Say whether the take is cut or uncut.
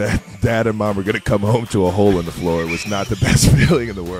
uncut